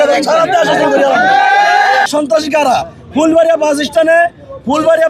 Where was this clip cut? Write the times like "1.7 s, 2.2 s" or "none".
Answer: 2.1 s